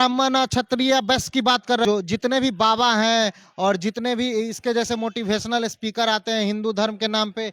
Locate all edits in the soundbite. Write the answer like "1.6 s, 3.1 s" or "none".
1.8 s